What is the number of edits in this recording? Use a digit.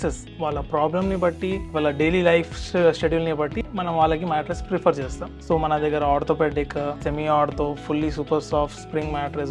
3